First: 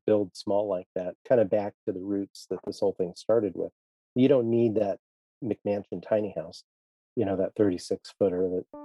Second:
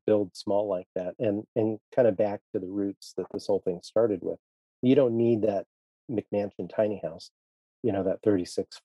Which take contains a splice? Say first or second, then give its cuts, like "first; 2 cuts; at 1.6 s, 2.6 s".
first; 1 cut; at 1.1 s